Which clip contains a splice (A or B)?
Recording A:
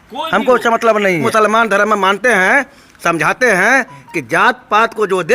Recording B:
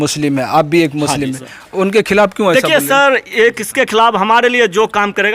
A